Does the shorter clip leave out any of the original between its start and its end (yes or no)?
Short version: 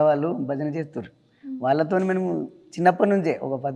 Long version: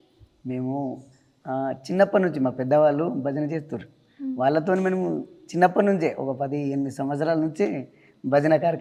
no